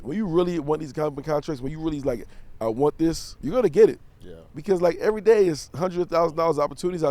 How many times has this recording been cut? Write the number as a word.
one